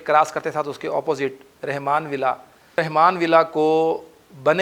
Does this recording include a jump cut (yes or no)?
yes